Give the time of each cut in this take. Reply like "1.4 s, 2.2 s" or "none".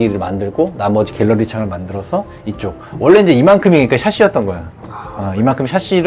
none